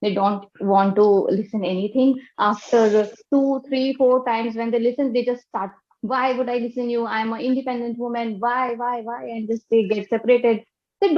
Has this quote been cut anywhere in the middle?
no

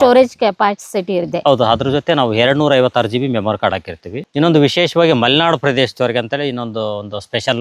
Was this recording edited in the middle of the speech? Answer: yes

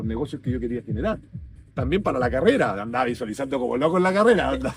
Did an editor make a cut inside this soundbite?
no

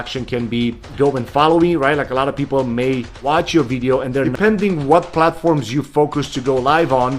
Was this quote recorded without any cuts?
no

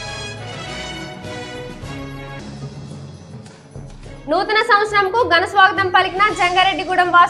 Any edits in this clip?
yes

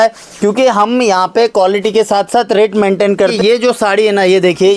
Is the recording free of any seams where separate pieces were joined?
no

